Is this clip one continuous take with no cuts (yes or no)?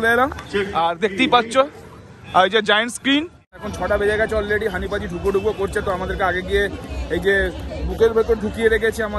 no